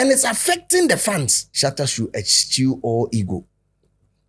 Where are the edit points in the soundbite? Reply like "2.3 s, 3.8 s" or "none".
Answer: 1.4 s